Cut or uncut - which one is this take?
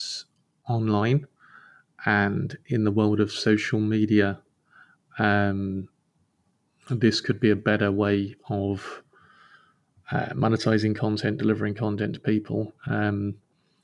uncut